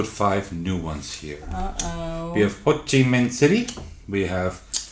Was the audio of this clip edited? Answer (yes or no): no